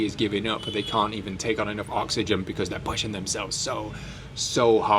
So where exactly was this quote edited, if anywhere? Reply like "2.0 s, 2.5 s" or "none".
none